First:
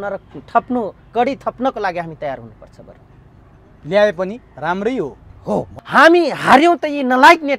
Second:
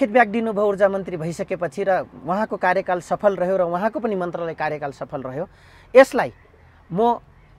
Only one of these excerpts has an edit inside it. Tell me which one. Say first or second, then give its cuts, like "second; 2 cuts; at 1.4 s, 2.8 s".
first; 1 cut; at 5.8 s